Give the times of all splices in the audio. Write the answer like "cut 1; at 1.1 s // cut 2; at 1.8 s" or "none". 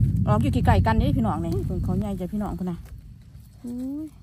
cut 1; at 1.5 s